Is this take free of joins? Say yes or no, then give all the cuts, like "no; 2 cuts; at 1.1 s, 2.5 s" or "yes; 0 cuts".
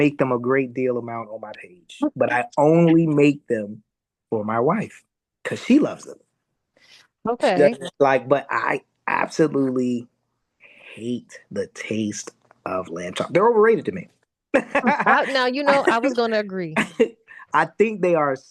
yes; 0 cuts